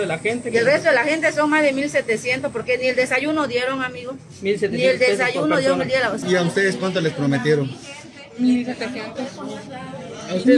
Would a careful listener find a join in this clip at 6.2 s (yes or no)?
yes